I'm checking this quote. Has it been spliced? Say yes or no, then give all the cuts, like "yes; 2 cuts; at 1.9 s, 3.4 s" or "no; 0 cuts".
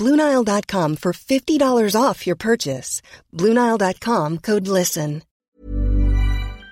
yes; 1 cut; at 5.4 s